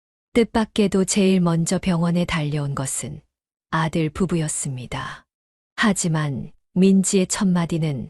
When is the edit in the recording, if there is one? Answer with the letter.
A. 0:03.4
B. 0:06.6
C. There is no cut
C